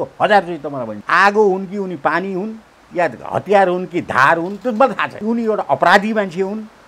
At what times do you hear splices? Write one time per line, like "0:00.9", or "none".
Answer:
0:00.9
0:05.2

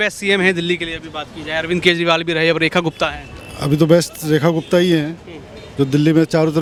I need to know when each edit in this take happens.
none

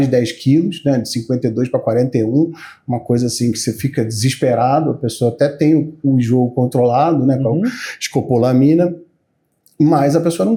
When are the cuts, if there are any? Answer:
none

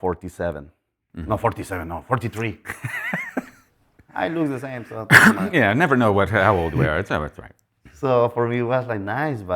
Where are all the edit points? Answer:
none

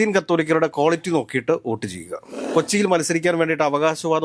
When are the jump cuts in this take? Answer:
0:02.4

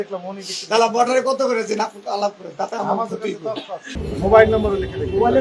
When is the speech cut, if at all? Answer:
0:04.0

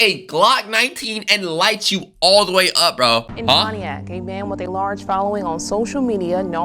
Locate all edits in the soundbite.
0:03.2

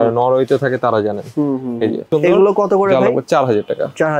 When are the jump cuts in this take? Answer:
0:02.1

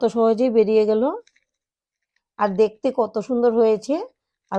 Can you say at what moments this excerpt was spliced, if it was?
none

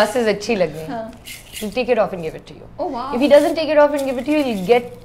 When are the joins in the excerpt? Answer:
none

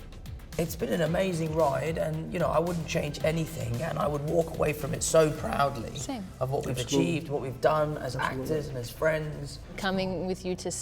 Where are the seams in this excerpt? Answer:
0:09.8

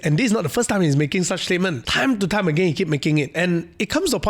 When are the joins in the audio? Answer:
0:01.8

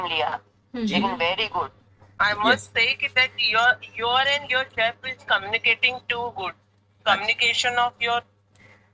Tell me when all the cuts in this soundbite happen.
0:02.2

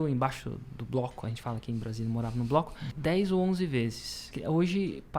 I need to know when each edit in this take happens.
0:02.8
0:04.3

